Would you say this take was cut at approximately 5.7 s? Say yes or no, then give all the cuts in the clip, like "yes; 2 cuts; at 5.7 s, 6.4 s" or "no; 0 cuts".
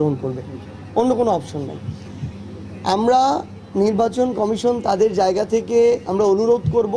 no; 1 cut; at 1.8 s